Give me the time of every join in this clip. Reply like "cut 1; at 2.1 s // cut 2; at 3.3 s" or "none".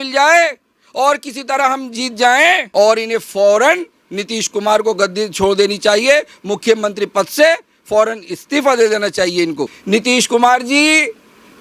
cut 1; at 2.6 s // cut 2; at 9.7 s